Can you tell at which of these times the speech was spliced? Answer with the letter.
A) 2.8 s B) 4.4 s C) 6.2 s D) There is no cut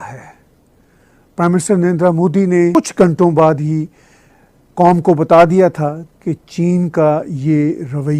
A